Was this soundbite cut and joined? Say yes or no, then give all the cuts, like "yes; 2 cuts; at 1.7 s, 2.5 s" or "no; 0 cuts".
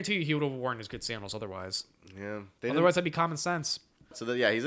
no; 0 cuts